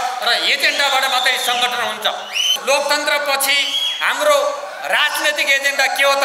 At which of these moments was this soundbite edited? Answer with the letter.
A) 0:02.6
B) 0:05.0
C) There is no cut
A